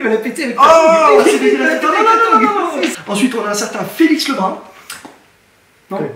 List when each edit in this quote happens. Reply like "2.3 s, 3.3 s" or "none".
3.0 s